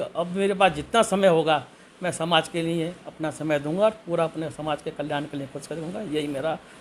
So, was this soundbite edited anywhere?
no; 0 cuts

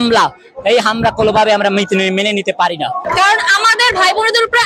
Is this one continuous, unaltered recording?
no; 1 cut; at 3.0 s

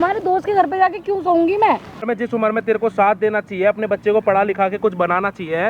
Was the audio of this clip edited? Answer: yes; 1 cut; at 2.0 s

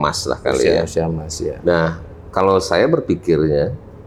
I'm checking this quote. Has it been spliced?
no; 0 cuts

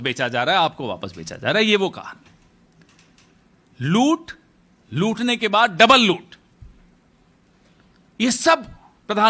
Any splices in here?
no; 0 cuts

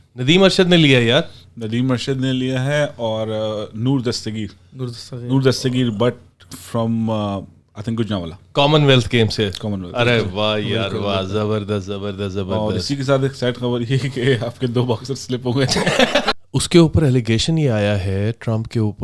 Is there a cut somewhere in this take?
yes; 1 cut; at 16.3 s

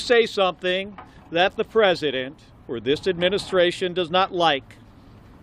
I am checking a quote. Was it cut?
no; 0 cuts

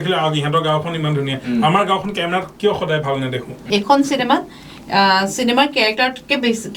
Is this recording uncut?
no; 1 cut; at 3.6 s

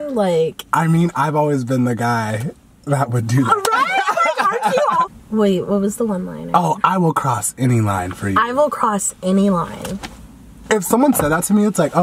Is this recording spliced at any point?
yes; 1 cut; at 5.1 s

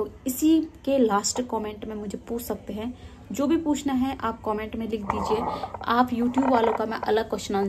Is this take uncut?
yes; 0 cuts

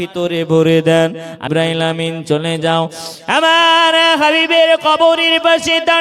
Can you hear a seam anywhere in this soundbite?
yes; 1 cut; at 1.5 s

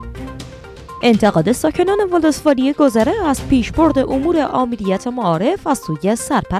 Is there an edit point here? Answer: no; 0 cuts

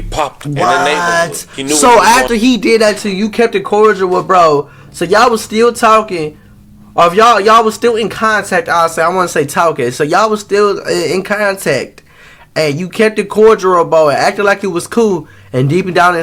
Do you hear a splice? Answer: no; 0 cuts

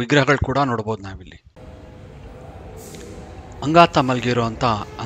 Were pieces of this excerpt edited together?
yes; 2 cuts; at 1.6 s, 3.6 s

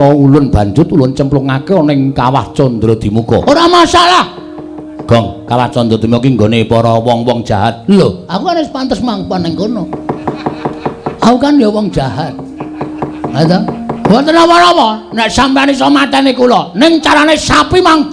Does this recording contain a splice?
yes; 1 cut; at 3.4 s

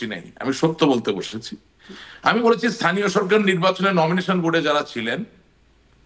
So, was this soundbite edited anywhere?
no; 0 cuts

